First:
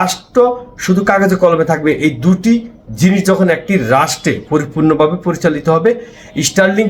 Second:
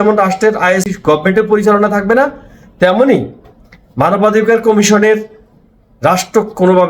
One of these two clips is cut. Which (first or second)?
second